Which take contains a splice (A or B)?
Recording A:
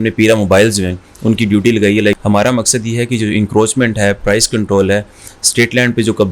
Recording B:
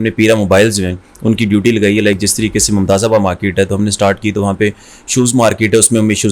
A